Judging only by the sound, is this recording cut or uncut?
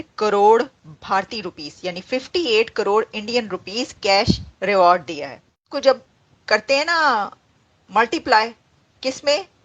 cut